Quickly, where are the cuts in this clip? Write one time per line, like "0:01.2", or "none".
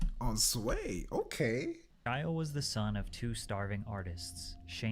0:01.9